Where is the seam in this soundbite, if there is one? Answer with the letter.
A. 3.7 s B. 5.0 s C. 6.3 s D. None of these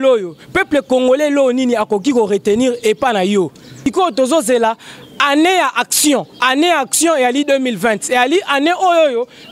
A